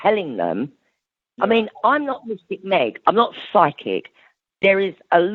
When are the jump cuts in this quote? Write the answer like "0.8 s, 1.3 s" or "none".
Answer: none